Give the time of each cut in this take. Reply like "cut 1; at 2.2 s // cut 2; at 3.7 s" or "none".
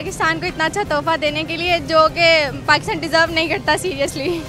none